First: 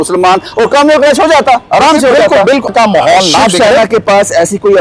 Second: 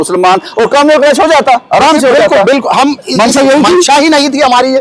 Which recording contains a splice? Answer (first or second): first